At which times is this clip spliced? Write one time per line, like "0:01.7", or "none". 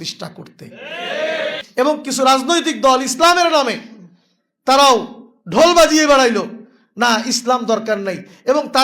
0:01.6